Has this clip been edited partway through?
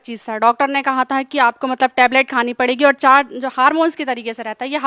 no; 0 cuts

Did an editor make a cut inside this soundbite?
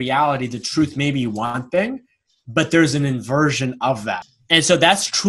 yes; 1 cut; at 4.2 s

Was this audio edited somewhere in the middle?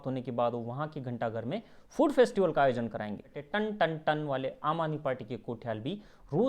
yes; 1 cut; at 3.4 s

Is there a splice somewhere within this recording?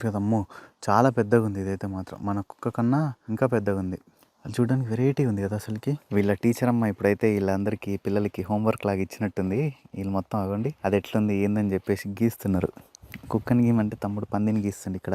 yes; 3 cuts; at 3.2 s, 6.0 s, 10.8 s

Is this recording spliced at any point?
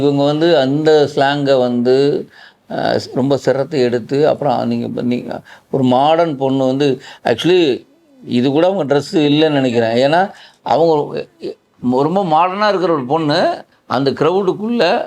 yes; 1 cut; at 13.7 s

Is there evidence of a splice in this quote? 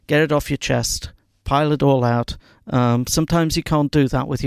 no; 0 cuts

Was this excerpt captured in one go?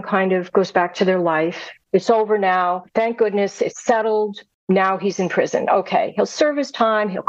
no; 3 cuts; at 1.8 s, 2.8 s, 4.5 s

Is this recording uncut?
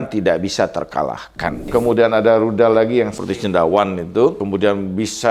no; 3 cuts; at 1.7 s, 3.2 s, 4.4 s

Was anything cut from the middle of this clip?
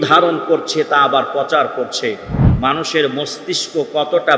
no; 0 cuts

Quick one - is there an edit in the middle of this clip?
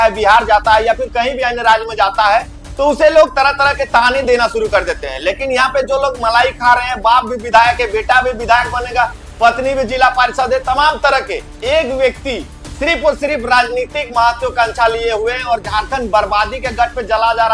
no; 0 cuts

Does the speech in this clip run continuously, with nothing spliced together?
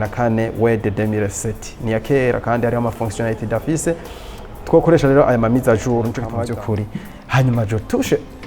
no; 1 cut; at 6.2 s

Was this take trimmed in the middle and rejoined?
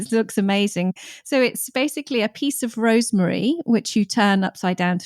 yes; 1 cut; at 0.9 s

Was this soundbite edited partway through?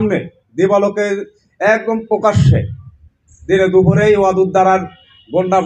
no; 0 cuts

